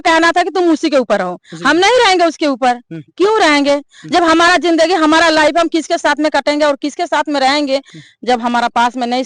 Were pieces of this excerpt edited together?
yes; 1 cut; at 7.9 s

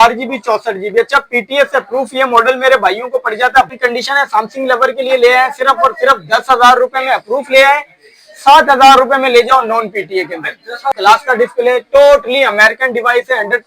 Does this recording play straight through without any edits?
no; 2 cuts; at 3.7 s, 11.0 s

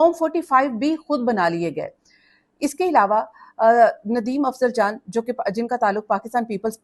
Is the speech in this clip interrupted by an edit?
no; 0 cuts

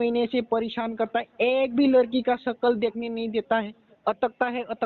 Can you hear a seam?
no; 0 cuts

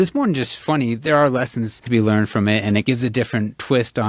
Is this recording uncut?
no; 2 cuts; at 1.8 s, 2.8 s

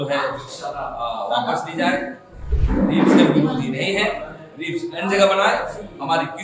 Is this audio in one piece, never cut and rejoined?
no; 1 cut; at 2.5 s

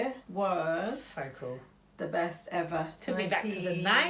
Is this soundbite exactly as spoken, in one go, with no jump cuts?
yes; 0 cuts

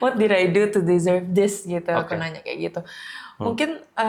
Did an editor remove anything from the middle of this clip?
no; 0 cuts

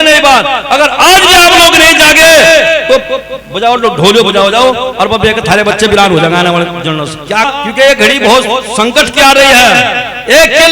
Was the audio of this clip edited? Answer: yes; 1 cut; at 7.5 s

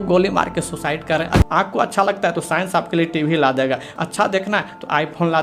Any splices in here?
yes; 2 cuts; at 1.4 s, 3.9 s

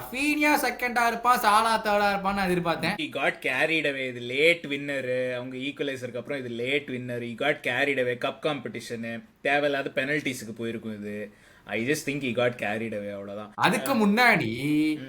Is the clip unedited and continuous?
no; 2 cuts; at 3.1 s, 13.5 s

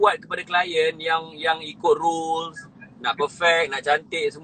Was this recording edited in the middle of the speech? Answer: no; 0 cuts

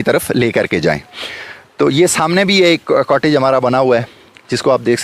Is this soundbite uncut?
yes; 0 cuts

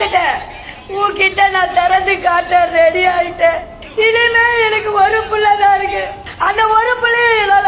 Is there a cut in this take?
yes; 2 cuts; at 3.8 s, 6.2 s

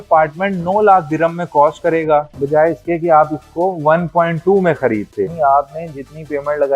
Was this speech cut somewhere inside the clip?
yes; 2 cuts; at 2.3 s, 5.3 s

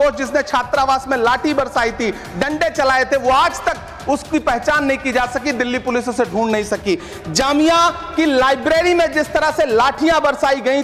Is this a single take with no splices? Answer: yes; 0 cuts

